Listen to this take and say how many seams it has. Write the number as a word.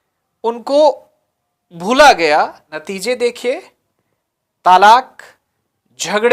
one